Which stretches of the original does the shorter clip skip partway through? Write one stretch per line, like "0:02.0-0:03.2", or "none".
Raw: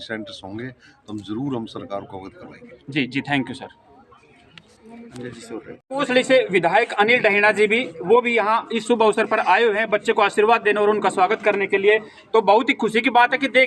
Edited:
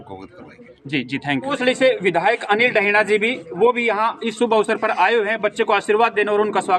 0:03.5-0:05.9